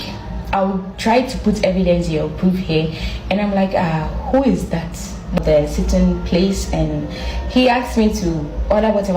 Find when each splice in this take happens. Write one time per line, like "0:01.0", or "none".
0:05.3